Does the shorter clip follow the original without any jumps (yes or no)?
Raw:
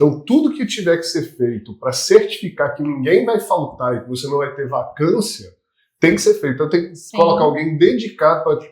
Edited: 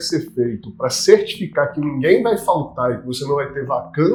yes